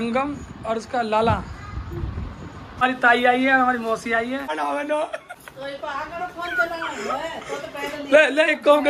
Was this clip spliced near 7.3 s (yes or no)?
no